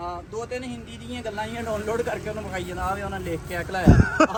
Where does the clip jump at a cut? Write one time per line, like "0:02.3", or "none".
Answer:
none